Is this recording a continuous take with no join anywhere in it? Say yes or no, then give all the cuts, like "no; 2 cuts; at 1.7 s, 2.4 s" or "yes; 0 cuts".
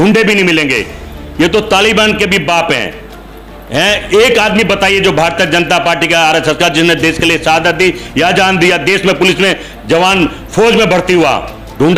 yes; 0 cuts